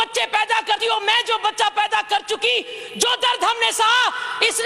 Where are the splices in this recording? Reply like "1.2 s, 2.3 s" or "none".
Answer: none